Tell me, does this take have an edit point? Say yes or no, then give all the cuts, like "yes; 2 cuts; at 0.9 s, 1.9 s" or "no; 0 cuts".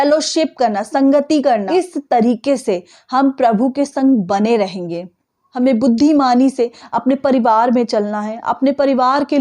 yes; 2 cuts; at 1.7 s, 5.2 s